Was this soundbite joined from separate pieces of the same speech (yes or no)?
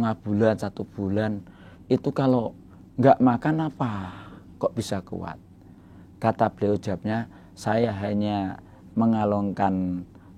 no